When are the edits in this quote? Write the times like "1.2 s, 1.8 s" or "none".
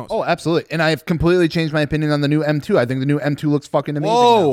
none